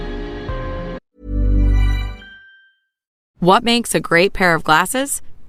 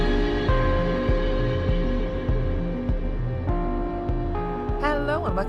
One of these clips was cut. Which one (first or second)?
second